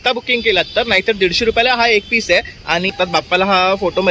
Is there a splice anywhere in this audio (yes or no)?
yes